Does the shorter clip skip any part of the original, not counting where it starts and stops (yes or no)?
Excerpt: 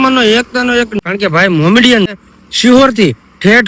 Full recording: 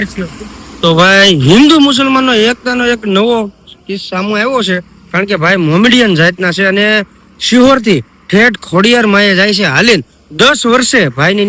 yes